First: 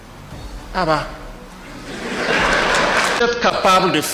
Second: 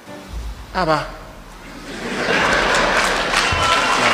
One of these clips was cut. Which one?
first; 1 cut; at 3.2 s

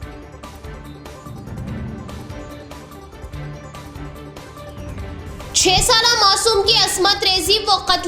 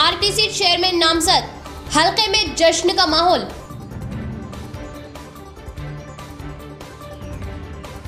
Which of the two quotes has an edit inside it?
first; 2 cuts; at 3.3 s, 5.1 s

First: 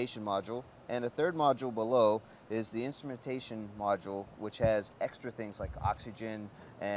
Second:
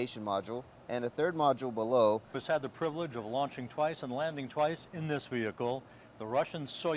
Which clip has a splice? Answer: first; 1 cut; at 2.4 s

